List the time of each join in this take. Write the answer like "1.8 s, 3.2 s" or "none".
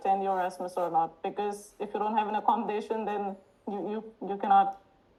none